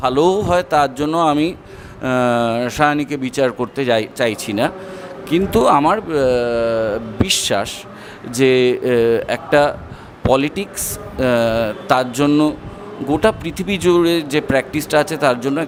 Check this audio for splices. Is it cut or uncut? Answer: uncut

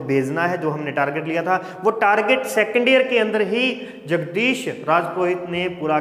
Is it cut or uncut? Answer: uncut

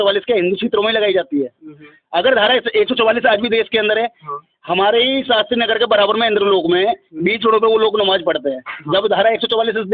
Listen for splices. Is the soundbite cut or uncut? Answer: uncut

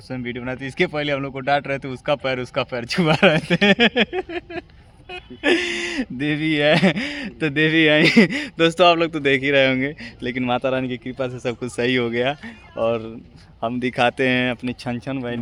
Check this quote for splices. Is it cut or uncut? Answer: uncut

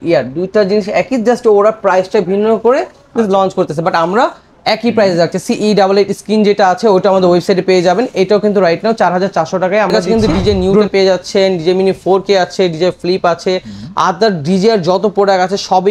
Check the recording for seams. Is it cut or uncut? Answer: cut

